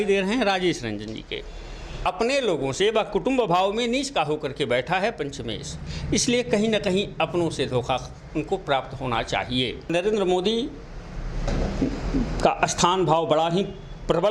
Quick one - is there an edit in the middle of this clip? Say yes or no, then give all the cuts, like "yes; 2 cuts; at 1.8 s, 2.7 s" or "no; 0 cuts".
yes; 2 cuts; at 2.1 s, 9.9 s